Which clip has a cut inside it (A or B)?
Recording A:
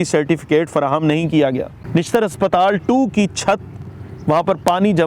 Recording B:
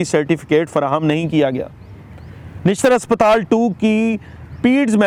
A